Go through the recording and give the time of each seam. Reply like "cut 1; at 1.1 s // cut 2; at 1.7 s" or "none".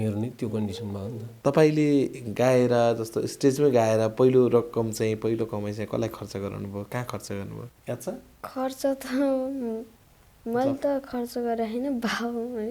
cut 1; at 1.3 s // cut 2; at 7.7 s